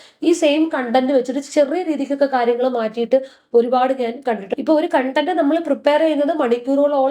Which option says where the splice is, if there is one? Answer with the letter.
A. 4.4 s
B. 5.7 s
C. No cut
A